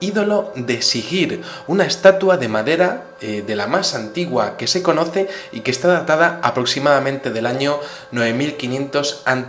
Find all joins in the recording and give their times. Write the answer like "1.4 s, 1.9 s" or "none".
none

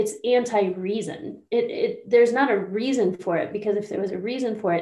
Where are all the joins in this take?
none

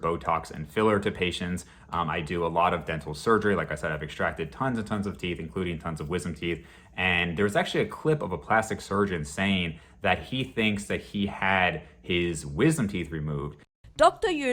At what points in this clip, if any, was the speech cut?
none

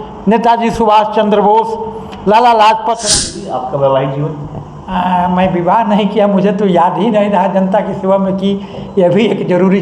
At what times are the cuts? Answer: 3.1 s

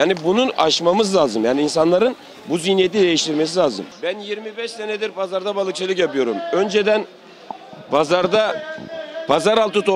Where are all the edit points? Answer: 3.9 s

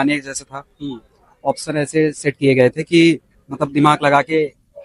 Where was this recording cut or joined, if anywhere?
none

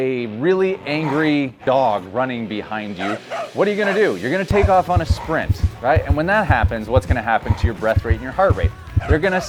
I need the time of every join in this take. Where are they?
none

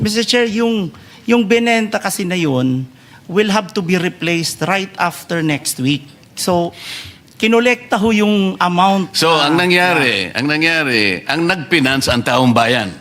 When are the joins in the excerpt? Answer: none

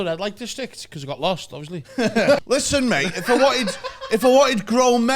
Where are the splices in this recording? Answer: 2.4 s

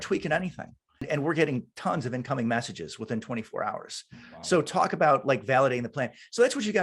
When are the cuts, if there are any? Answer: 1.0 s

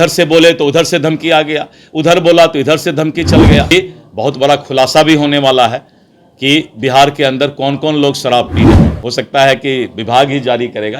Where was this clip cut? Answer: 3.7 s, 8.9 s

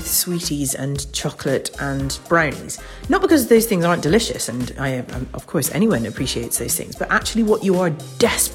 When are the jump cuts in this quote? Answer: none

